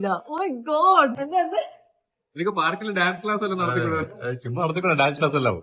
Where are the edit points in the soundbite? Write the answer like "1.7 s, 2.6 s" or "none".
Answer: 1.2 s